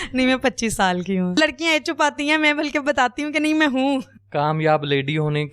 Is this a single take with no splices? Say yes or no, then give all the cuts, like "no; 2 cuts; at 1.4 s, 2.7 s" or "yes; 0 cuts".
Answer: no; 2 cuts; at 1.3 s, 4.2 s